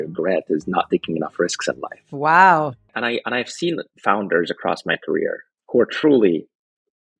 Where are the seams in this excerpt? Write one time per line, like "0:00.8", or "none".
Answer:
0:02.9
0:05.5